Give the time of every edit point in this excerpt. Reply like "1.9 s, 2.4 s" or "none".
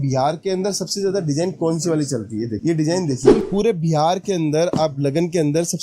3.3 s